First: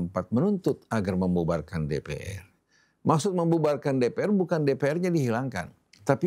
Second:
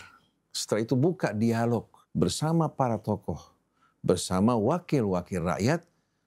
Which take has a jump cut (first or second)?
second